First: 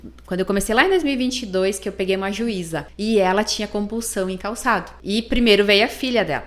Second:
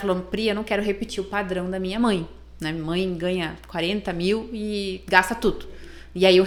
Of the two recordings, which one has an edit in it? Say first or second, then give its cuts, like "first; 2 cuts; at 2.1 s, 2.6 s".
first; 2 cuts; at 2.8 s, 4.9 s